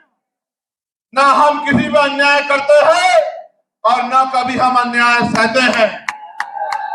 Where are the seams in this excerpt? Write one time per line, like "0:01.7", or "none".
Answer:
none